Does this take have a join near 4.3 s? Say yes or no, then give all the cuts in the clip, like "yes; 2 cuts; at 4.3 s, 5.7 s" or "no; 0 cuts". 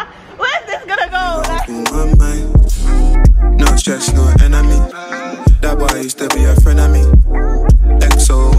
no; 1 cut; at 1.7 s